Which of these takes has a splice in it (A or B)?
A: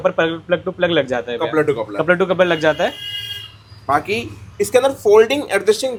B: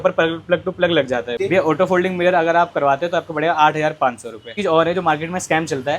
B